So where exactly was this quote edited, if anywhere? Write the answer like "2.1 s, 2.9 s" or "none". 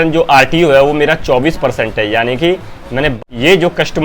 3.1 s